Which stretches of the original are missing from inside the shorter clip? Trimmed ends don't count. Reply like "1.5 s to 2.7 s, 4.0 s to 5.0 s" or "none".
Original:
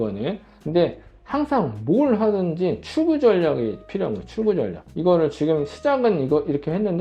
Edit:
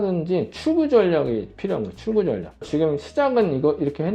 5.0 s to 5.3 s